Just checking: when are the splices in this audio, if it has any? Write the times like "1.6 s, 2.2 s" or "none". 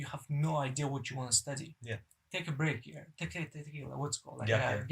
none